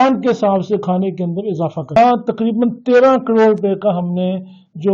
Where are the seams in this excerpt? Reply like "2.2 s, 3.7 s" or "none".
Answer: 2.0 s